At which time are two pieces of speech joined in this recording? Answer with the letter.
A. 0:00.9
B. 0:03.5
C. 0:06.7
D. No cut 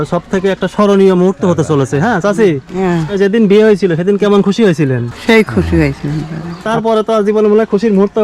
C